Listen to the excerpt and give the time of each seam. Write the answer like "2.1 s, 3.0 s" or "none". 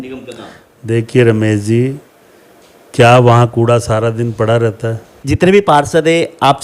5.2 s

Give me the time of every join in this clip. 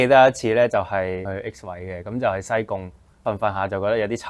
1.3 s, 3.2 s

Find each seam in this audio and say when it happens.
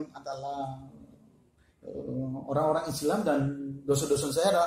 none

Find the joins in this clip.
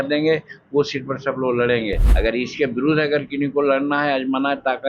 2.1 s

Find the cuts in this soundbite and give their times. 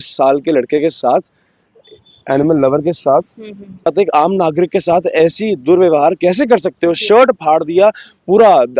3.9 s

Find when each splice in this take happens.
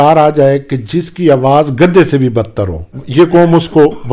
3.0 s

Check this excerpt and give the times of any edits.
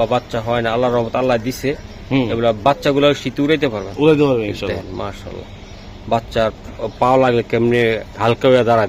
none

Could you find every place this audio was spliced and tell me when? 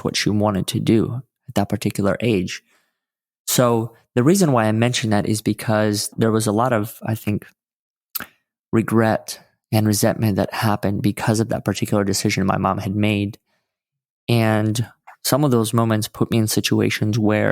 6.1 s

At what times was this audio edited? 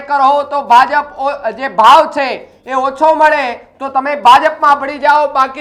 none

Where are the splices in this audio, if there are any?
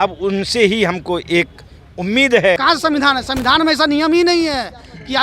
2.6 s

